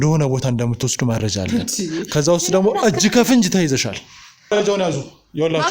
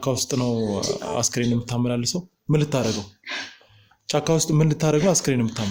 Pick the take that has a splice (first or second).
first